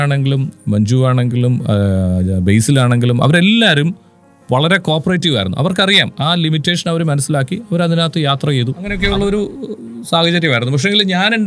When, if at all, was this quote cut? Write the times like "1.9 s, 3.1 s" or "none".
8.9 s